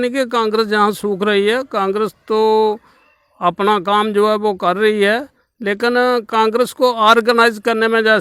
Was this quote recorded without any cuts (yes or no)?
yes